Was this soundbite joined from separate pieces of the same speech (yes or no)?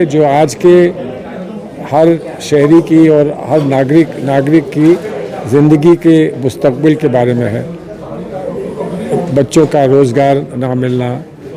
no